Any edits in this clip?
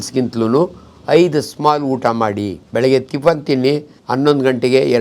yes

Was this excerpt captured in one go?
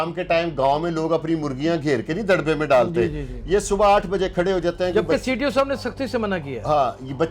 yes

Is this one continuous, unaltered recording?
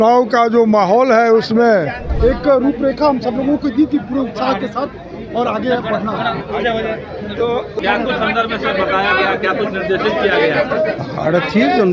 no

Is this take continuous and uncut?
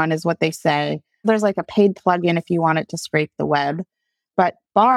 no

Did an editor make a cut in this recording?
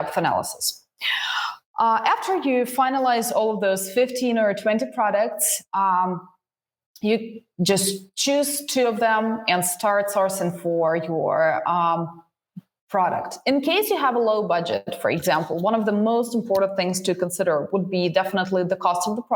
no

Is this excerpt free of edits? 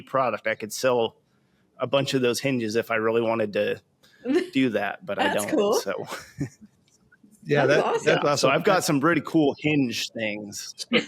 no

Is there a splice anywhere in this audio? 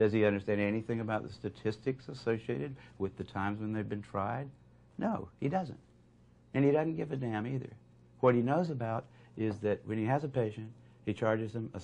no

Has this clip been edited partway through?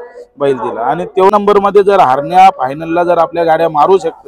yes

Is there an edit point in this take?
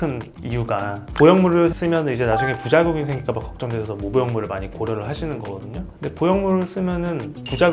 no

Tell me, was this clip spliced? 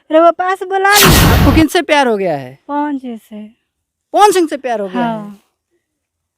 yes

